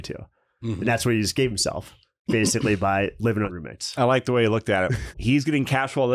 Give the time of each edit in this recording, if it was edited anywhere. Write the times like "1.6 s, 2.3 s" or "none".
3.5 s, 5.0 s